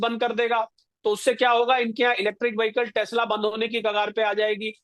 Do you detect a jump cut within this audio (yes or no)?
no